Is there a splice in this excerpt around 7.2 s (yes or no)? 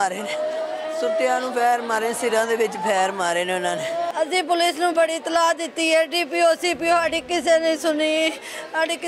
no